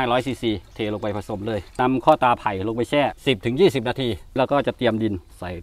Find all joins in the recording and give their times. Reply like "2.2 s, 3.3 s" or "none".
1.8 s, 3.2 s, 4.4 s